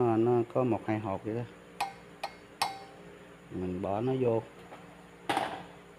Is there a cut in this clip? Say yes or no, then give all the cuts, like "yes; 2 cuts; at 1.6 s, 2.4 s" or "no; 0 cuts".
no; 0 cuts